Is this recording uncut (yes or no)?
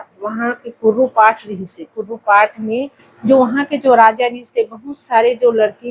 yes